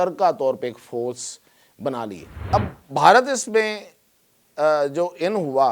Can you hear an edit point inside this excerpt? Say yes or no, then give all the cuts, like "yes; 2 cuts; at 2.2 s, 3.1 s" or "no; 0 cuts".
yes; 1 cut; at 2.3 s